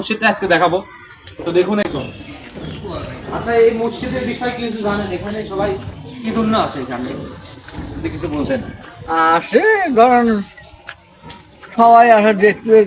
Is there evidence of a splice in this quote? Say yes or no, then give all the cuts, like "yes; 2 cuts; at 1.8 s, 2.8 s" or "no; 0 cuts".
yes; 1 cut; at 1.9 s